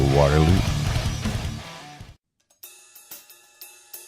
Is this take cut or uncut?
cut